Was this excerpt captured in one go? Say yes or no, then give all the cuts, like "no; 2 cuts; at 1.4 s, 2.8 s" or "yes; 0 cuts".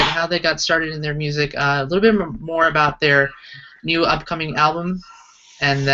no; 1 cut; at 1.5 s